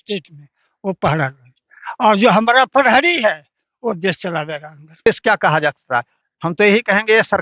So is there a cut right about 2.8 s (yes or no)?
no